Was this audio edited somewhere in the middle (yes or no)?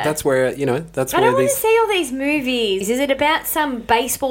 yes